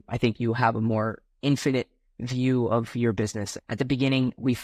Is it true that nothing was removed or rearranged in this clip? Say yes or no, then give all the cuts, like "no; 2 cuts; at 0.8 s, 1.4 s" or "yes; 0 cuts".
no; 1 cut; at 3.5 s